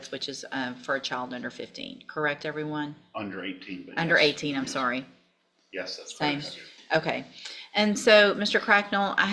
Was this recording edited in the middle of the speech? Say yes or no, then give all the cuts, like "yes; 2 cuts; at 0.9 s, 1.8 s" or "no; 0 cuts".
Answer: no; 0 cuts